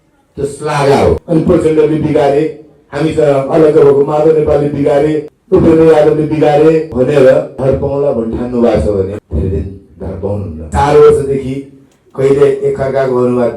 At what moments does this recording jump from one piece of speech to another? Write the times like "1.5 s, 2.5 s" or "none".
1.2 s, 5.3 s, 6.9 s, 7.5 s, 9.2 s, 10.5 s

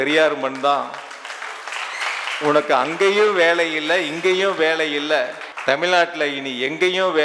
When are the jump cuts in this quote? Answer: 5.4 s

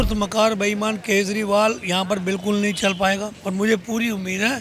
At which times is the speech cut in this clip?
3.3 s

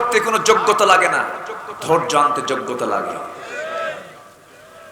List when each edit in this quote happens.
none

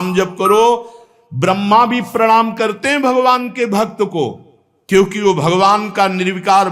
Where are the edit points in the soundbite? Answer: none

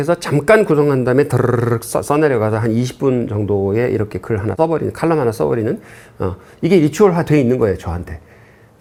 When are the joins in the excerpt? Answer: none

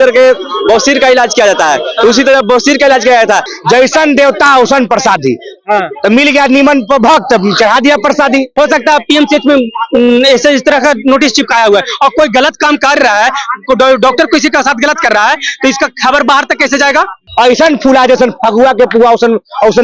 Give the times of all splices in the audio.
3.5 s, 8.5 s, 17.2 s

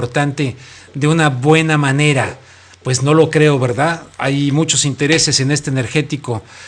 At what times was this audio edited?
none

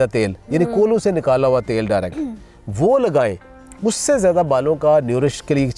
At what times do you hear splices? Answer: none

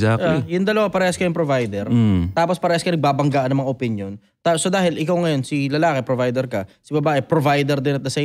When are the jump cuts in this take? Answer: none

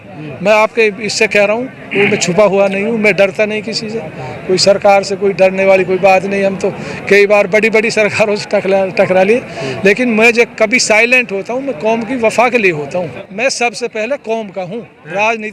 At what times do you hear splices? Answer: 13.2 s

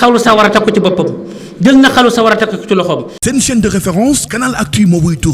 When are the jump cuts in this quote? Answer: 3.1 s

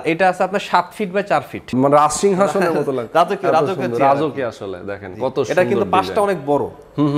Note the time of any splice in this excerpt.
1.7 s

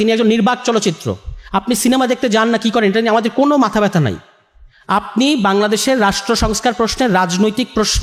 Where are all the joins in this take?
none

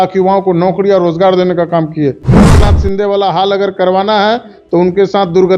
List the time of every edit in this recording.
2.5 s

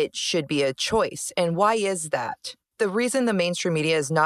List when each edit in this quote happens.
2.7 s

